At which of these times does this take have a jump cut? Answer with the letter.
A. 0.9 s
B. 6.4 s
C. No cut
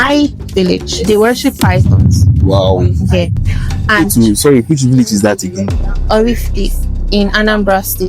A